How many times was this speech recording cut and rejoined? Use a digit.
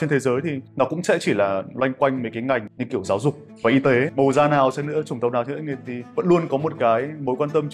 1